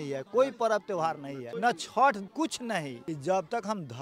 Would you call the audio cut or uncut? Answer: cut